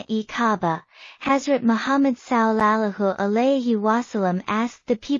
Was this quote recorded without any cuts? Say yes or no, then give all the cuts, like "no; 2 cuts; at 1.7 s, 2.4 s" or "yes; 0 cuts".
no; 1 cut; at 1.0 s